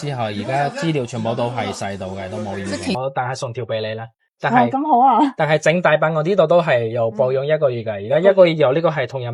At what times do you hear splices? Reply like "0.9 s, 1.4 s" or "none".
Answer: 2.9 s